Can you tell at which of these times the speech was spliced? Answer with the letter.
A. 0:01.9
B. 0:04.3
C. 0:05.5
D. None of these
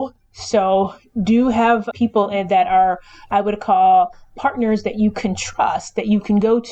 A